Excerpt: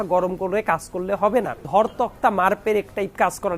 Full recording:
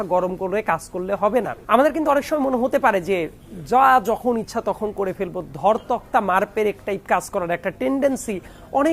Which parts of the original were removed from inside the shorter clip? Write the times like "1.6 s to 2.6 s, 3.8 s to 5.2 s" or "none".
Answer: 1.6 s to 5.5 s

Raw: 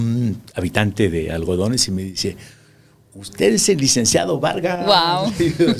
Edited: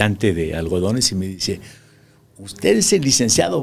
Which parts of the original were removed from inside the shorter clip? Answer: none

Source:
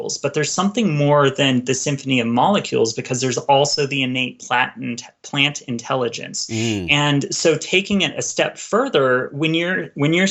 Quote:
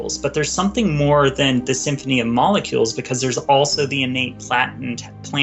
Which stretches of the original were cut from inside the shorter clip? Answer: none

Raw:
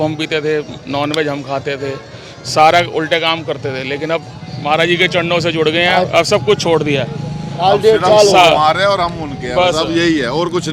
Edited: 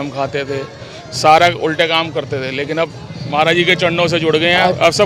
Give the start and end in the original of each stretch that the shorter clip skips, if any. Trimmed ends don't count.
none

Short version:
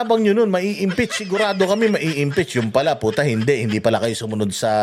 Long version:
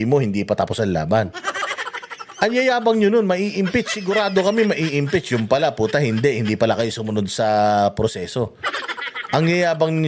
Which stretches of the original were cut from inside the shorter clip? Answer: none

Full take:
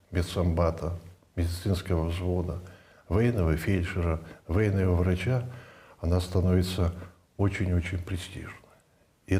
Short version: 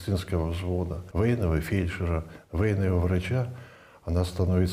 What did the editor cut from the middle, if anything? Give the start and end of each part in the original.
2.6 s to 3.0 s

